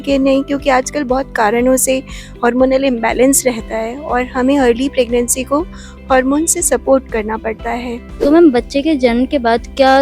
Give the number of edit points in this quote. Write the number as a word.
one